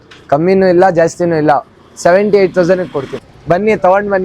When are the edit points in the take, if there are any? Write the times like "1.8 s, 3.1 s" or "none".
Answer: 3.2 s